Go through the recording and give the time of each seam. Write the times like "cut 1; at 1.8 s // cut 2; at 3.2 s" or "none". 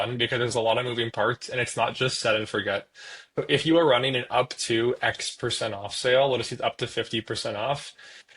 none